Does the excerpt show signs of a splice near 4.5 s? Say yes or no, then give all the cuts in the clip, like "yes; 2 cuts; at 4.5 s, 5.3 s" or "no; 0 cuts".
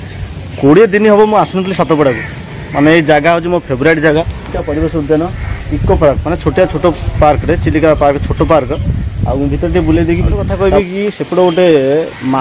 yes; 2 cuts; at 4.5 s, 10.4 s